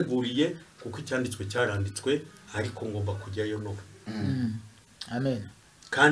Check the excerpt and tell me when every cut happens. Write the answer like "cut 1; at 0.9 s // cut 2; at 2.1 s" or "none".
none